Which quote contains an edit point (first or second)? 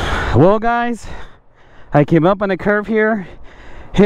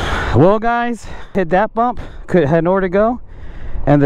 second